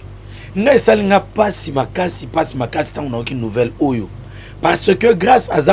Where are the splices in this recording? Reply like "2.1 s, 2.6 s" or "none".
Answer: none